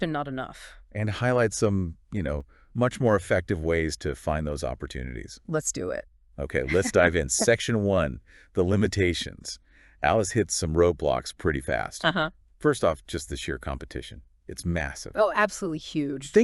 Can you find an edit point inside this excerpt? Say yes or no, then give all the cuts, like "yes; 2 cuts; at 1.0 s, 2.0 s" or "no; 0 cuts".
no; 0 cuts